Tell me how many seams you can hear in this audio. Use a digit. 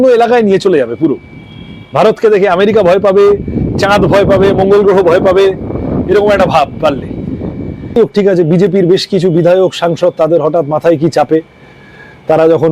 1